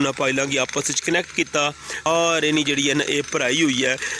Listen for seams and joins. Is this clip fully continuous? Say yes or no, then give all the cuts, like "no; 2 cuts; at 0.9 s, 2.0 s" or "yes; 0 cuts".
no; 1 cut; at 2.1 s